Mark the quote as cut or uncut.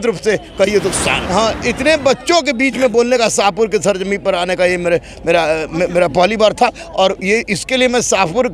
cut